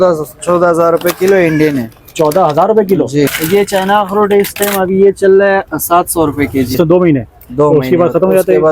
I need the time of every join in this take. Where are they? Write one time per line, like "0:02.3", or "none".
0:03.4
0:06.8